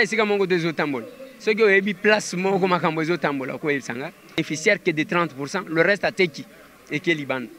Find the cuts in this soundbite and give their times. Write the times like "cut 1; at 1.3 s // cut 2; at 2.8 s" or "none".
cut 1; at 4.4 s